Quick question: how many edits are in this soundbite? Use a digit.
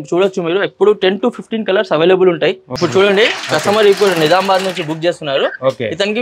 1